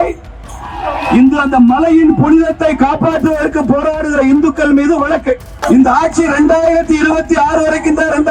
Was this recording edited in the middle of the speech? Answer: yes; 1 cut; at 5.6 s

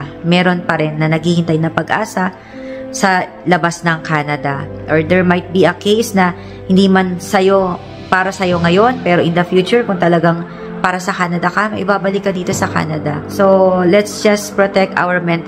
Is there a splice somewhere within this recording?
no; 0 cuts

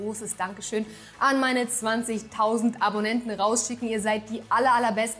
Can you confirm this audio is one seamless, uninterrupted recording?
yes; 0 cuts

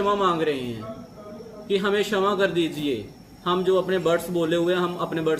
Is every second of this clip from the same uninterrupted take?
yes; 0 cuts

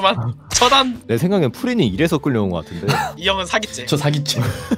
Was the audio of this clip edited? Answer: yes; 2 cuts; at 1.0 s, 3.2 s

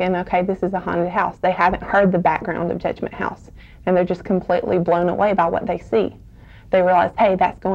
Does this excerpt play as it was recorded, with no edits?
yes; 0 cuts

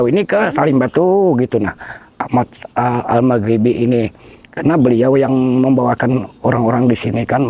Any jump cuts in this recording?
no; 0 cuts

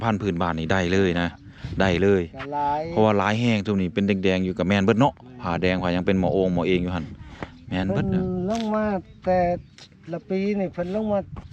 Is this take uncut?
yes; 0 cuts

